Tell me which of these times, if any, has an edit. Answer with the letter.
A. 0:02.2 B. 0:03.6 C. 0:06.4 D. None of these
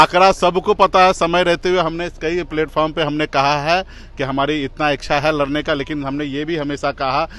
D